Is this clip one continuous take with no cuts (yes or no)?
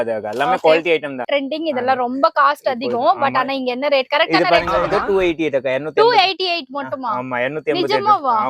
no